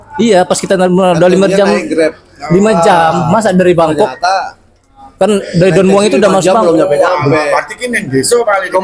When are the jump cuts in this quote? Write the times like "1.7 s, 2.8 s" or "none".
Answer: none